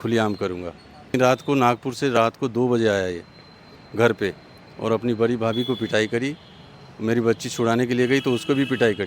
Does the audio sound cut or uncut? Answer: cut